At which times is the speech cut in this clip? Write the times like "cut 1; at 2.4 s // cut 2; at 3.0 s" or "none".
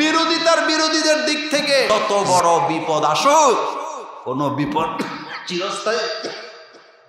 cut 1; at 1.9 s